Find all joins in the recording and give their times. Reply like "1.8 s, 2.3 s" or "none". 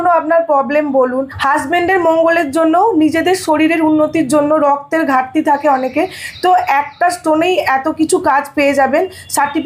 none